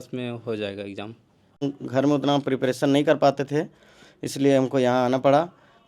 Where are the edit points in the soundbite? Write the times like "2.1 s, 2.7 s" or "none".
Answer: 1.7 s

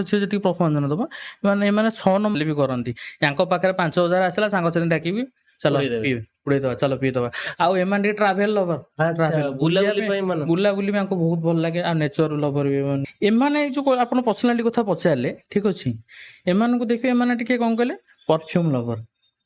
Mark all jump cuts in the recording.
2.3 s, 13.1 s

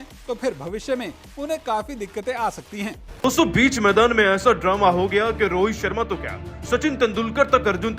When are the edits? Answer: 3.1 s

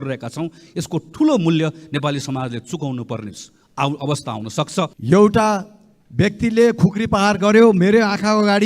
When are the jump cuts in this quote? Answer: 5.0 s

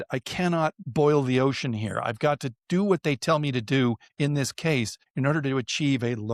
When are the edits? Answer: none

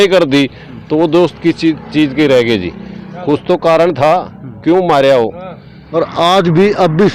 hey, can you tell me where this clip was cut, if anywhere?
5.8 s

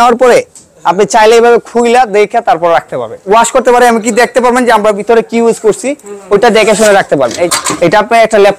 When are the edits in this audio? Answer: 3.3 s, 7.4 s

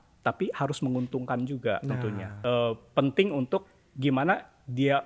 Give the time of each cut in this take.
2.3 s

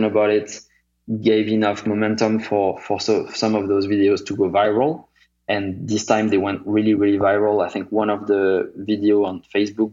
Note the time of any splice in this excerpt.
1.8 s, 5.4 s

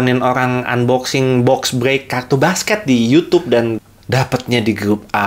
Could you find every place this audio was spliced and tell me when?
3.7 s

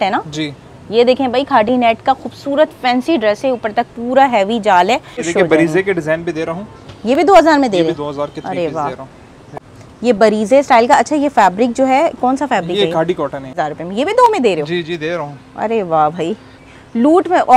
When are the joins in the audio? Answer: 5.3 s, 9.5 s, 13.6 s

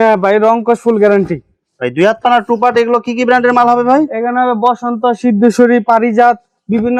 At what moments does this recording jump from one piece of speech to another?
none

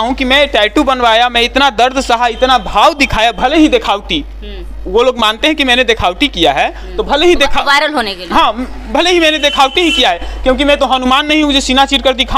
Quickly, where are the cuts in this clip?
none

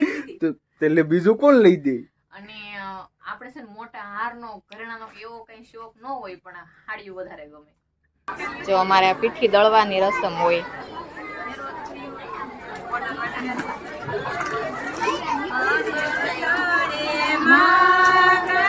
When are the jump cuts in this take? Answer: 8.3 s

